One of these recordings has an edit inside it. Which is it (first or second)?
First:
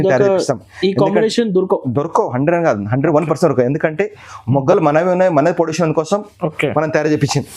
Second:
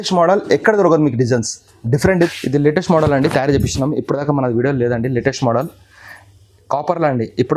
second